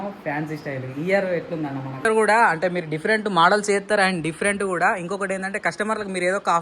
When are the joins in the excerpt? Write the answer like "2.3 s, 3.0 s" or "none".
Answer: 2.1 s